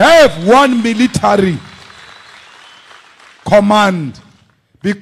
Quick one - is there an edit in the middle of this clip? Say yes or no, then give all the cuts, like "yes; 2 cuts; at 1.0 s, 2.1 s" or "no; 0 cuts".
no; 0 cuts